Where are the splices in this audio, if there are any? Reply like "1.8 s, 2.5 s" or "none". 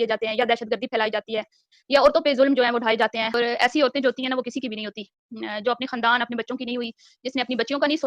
3.4 s